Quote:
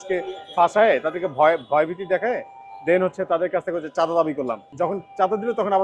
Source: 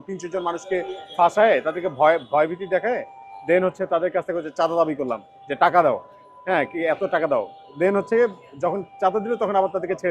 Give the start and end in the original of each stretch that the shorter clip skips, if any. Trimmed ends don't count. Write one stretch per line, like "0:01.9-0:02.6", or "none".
0:05.2-0:08.5